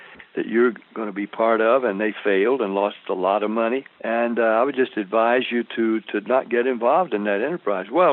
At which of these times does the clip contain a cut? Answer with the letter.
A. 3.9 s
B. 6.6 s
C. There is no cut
A